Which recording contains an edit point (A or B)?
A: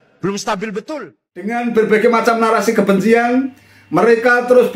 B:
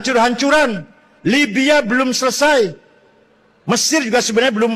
A